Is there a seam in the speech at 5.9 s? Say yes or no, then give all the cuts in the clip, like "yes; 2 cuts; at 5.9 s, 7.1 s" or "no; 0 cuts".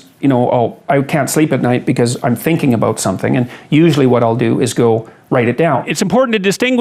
yes; 1 cut; at 5.9 s